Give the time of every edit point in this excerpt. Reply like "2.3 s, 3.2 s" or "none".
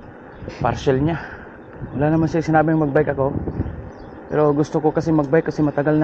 1.4 s